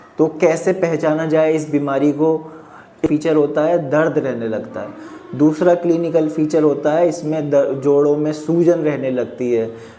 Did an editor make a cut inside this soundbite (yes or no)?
yes